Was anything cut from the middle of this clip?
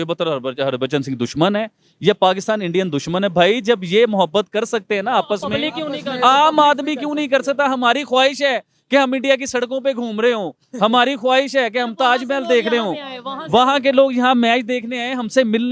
no; 0 cuts

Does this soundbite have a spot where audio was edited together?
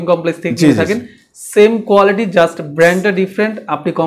no; 0 cuts

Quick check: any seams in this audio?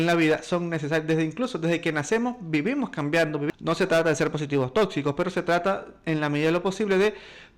yes; 1 cut; at 3.5 s

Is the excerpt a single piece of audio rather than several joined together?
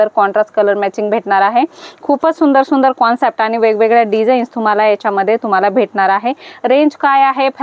yes; 0 cuts

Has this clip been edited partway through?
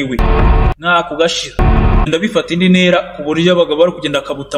yes; 1 cut; at 2.1 s

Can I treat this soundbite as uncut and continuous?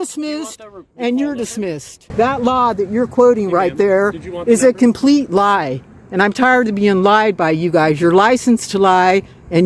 no; 1 cut; at 2.0 s

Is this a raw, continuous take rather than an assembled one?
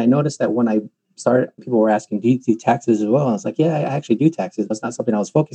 no; 1 cut; at 1.6 s

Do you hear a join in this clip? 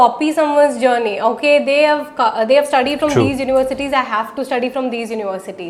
no; 0 cuts

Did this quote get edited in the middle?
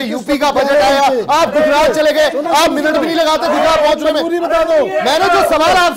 no; 0 cuts

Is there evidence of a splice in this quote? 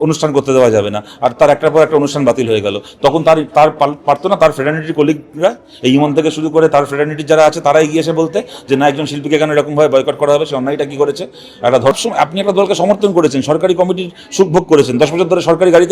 yes; 1 cut; at 12.0 s

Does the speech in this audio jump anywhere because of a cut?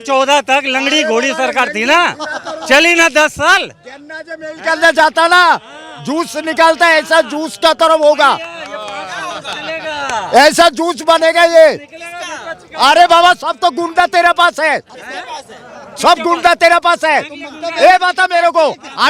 no; 0 cuts

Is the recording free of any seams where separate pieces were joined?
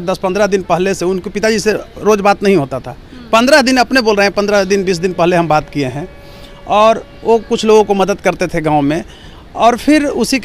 yes; 0 cuts

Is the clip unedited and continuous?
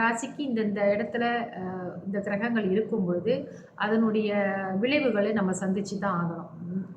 yes; 0 cuts

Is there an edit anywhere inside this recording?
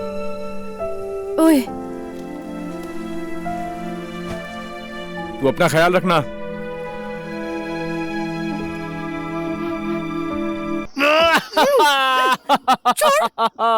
yes; 1 cut; at 10.9 s

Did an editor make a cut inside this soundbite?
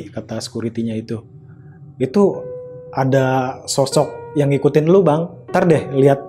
yes; 2 cuts; at 4.2 s, 5.3 s

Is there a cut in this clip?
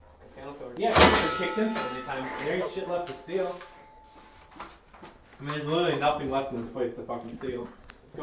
no; 0 cuts

